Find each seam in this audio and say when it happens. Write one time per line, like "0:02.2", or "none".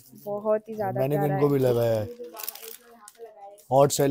0:00.9